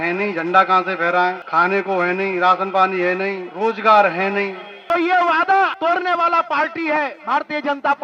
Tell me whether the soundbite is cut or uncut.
cut